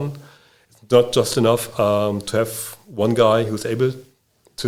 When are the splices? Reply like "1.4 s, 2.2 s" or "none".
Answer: none